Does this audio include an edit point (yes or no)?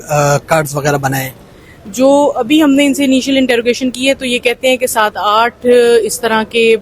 no